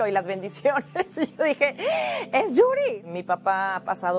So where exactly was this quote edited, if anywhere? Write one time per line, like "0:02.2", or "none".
0:03.0